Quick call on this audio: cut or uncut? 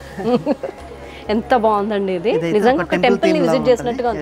uncut